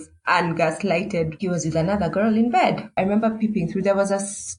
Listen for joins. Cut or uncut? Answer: cut